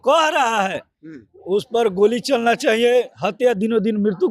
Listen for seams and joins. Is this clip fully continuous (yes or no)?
yes